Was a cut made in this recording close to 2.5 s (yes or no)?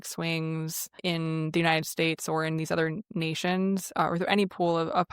no